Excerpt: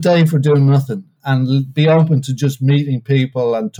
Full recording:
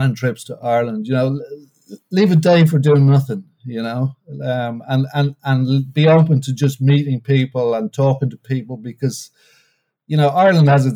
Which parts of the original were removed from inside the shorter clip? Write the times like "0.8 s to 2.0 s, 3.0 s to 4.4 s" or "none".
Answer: 3.6 s to 5.4 s